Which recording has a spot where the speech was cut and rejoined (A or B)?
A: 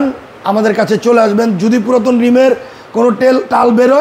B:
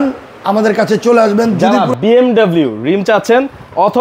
B